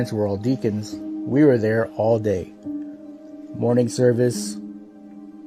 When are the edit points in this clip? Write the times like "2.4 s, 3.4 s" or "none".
1.5 s